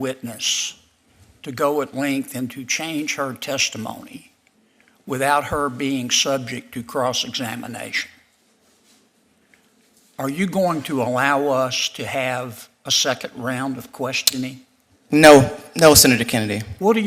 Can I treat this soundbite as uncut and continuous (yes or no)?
yes